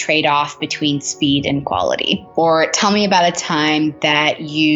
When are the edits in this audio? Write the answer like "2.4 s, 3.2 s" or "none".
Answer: 2.2 s